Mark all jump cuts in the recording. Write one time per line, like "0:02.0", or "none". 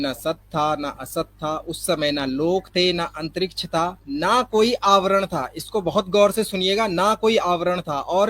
0:04.0